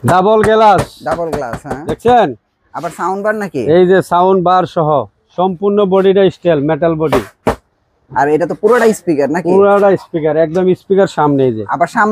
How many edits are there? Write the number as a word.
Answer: zero